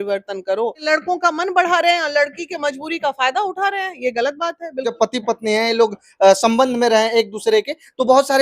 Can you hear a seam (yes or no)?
yes